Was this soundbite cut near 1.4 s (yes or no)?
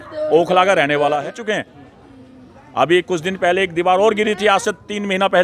yes